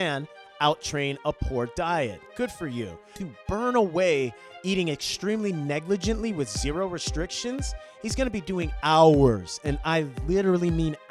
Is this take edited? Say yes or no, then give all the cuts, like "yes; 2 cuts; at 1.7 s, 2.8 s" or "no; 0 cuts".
yes; 1 cut; at 3.2 s